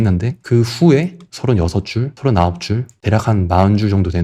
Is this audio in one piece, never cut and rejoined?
no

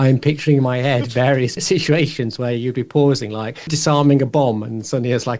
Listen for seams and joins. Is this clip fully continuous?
no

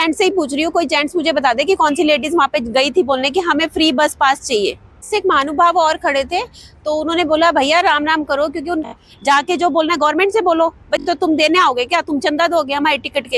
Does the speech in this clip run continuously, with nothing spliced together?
no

